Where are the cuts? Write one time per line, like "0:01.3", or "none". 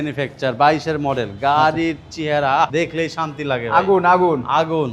0:02.7